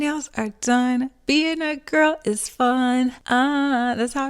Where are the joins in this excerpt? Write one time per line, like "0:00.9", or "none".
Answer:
0:03.2